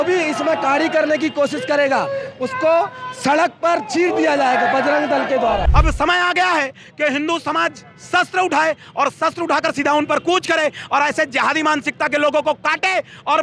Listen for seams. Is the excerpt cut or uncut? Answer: cut